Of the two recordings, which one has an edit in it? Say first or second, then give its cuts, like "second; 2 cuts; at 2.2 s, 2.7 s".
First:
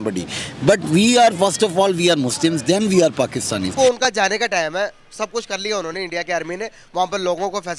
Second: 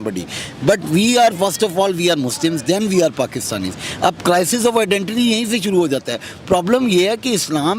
first; 1 cut; at 3.7 s